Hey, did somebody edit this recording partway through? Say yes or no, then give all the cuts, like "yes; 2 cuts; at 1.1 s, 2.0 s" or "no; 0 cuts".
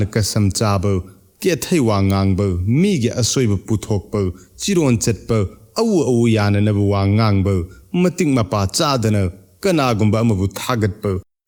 no; 0 cuts